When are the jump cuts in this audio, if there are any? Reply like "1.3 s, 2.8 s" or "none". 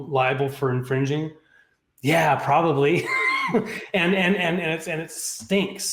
none